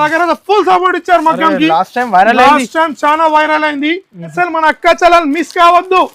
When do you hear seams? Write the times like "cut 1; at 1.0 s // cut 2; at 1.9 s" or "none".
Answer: cut 1; at 4.3 s